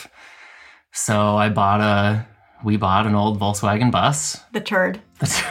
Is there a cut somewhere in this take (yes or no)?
no